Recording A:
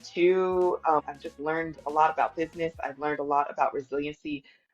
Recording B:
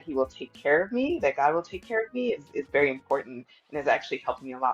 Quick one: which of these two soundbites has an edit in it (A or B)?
A